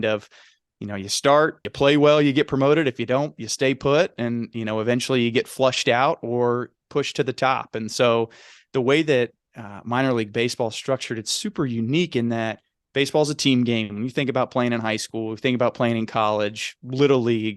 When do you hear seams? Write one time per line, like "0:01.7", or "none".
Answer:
0:01.6